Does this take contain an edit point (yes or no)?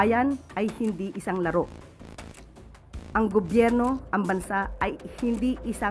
yes